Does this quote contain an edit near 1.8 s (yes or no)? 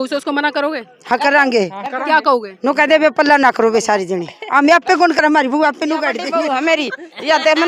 no